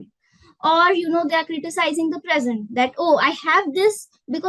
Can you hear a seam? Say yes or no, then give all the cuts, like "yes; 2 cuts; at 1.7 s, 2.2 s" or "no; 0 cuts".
no; 0 cuts